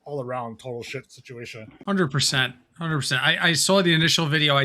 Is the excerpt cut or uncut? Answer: cut